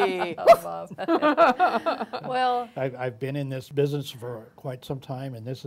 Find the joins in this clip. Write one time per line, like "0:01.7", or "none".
0:03.6